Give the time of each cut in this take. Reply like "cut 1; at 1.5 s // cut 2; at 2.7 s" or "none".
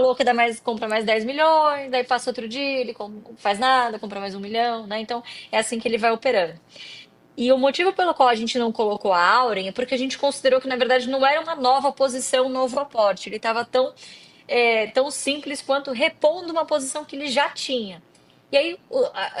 none